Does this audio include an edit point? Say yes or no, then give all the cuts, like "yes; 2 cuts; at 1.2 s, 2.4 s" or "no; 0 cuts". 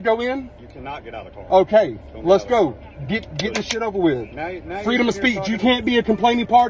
no; 0 cuts